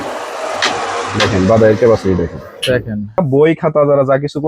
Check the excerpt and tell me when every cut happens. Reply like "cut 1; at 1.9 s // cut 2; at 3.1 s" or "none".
cut 1; at 3.2 s